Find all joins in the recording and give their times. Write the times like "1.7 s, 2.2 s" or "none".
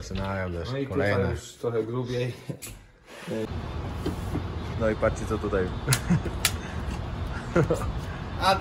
3.5 s